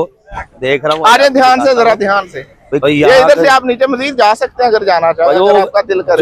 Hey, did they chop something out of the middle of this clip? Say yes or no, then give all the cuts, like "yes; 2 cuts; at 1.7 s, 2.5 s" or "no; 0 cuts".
yes; 1 cut; at 2.8 s